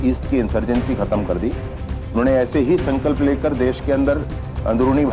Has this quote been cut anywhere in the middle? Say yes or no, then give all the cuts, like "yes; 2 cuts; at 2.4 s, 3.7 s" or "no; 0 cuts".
no; 0 cuts